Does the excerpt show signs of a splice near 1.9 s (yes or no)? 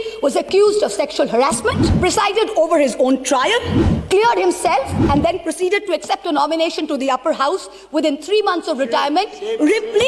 yes